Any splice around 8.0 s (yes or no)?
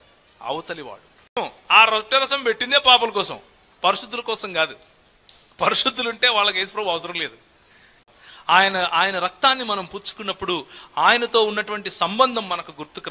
yes